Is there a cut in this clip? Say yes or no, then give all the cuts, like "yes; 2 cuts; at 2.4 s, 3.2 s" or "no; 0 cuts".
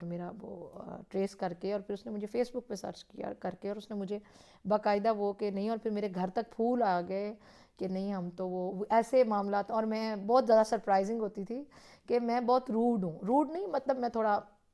no; 0 cuts